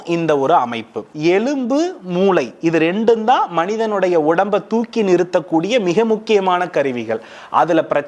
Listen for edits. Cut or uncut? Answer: cut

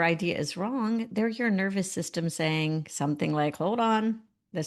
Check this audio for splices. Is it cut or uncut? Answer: uncut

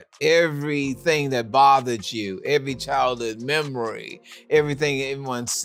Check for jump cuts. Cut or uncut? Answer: uncut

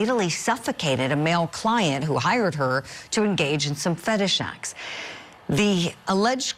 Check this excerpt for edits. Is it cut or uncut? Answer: uncut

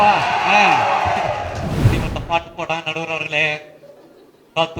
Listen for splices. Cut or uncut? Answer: cut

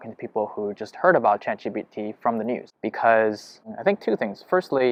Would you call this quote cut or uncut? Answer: uncut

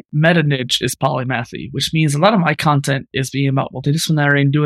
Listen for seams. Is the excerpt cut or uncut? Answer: uncut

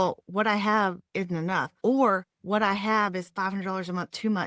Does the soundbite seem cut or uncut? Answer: cut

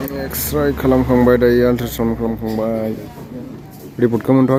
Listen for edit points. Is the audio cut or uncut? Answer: uncut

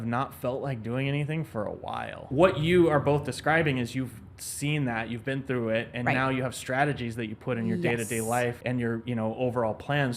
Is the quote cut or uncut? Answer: cut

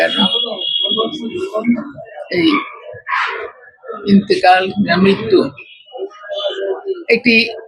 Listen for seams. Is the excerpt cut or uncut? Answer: uncut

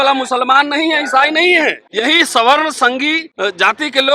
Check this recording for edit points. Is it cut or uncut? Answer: cut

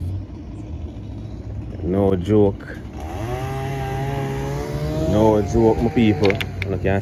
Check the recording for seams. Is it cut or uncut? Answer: uncut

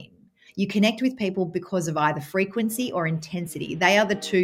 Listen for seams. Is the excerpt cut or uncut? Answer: uncut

